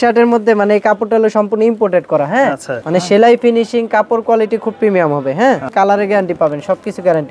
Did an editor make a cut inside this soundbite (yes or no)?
yes